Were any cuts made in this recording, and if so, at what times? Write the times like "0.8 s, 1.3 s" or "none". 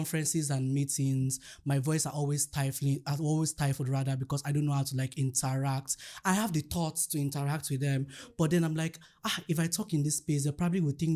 none